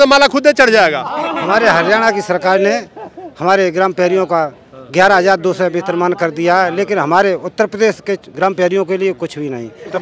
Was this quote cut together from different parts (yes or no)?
no